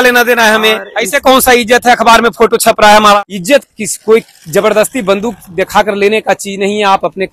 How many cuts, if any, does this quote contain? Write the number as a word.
one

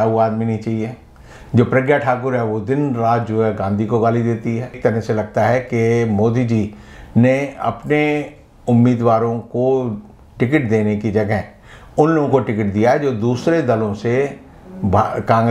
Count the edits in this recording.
one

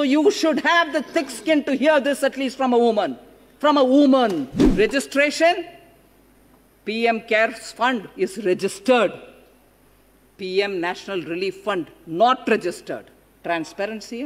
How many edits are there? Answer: one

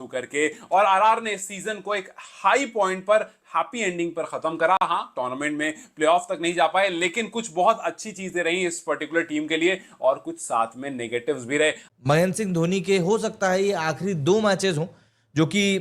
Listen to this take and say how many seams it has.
one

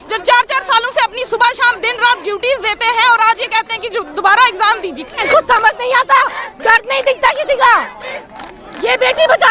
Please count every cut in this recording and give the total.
one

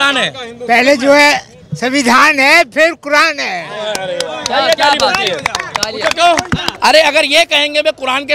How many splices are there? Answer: one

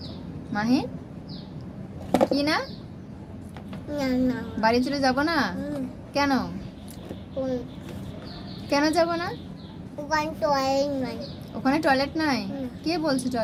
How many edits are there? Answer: zero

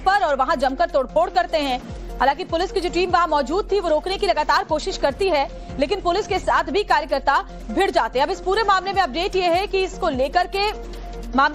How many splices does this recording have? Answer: one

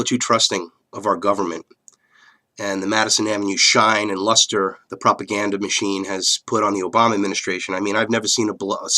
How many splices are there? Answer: one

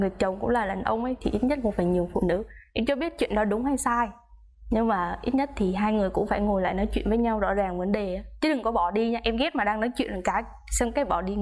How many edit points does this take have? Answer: zero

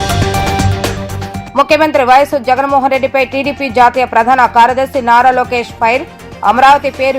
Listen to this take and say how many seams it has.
one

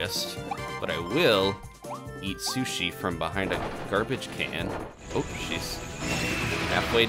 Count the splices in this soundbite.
one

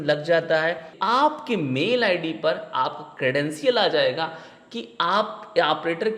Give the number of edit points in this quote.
one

